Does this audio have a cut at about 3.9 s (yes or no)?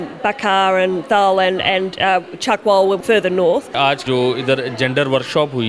yes